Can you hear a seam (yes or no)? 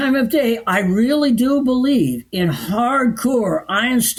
no